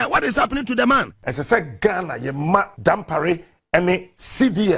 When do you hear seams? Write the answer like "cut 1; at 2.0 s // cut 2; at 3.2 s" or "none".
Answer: cut 1; at 1.2 s // cut 2; at 2.7 s